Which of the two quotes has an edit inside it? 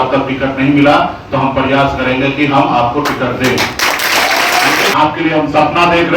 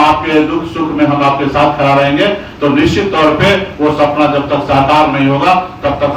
first; 1 cut; at 4.9 s

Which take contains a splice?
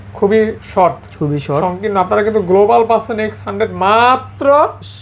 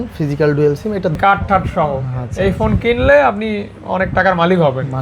second; 1 cut; at 1.2 s

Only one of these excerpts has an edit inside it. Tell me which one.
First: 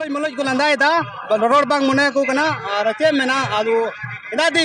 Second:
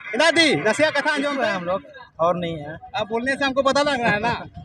second; 1 cut; at 1.4 s

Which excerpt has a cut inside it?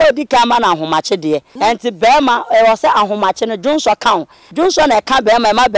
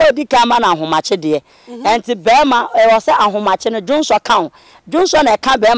first; 2 cuts; at 1.5 s, 4.4 s

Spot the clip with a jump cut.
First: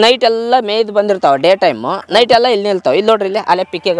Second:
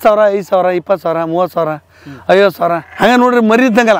second; 1 cut; at 2.9 s

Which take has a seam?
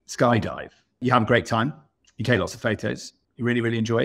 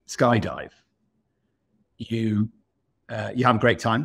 first; 2 cuts; at 0.9 s, 3.1 s

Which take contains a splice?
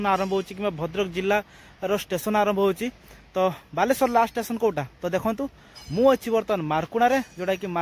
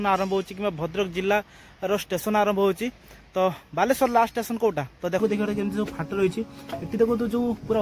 second; 1 cut; at 5.2 s

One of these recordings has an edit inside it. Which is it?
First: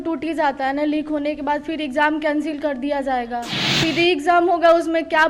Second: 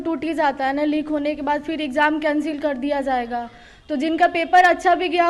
first; 1 cut; at 3.6 s

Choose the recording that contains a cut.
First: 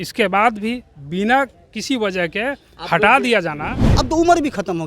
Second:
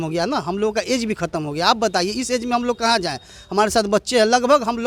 first; 1 cut; at 3.8 s

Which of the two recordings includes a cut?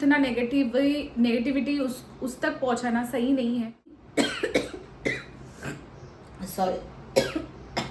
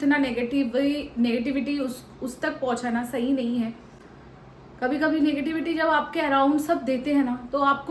first; 1 cut; at 4.0 s

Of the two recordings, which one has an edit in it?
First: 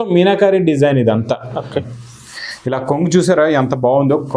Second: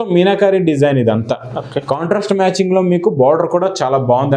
first; 1 cut; at 1.8 s

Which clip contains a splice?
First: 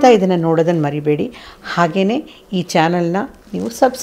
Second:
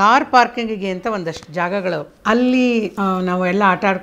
second; 2 cuts; at 2.1 s, 2.9 s

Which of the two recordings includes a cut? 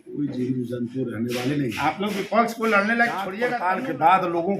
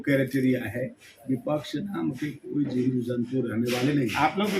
first; 1 cut; at 3.4 s

